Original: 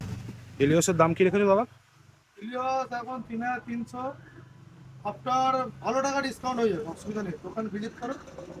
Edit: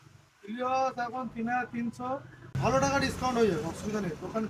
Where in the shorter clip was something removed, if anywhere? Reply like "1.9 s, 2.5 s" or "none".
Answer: 2.5 s